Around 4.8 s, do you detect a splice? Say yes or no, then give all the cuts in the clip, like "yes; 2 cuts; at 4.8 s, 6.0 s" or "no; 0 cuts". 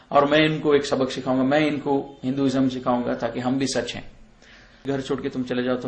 yes; 1 cut; at 4.8 s